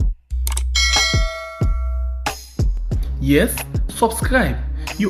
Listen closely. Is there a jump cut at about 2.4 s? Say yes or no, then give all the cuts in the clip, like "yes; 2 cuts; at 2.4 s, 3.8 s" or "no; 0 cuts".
no; 0 cuts